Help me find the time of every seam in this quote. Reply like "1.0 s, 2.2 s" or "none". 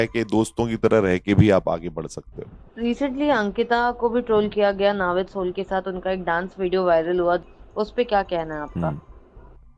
none